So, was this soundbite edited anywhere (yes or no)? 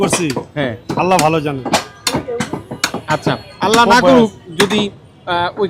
no